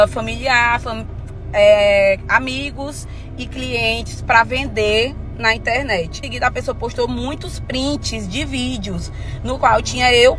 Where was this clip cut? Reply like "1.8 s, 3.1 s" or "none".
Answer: 6.2 s